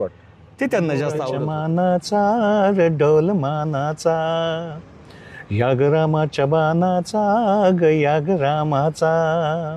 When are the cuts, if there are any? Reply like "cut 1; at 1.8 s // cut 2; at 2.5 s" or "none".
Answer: cut 1; at 1.4 s